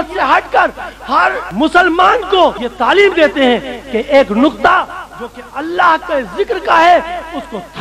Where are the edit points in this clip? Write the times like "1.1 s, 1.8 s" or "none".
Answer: 1.4 s, 2.7 s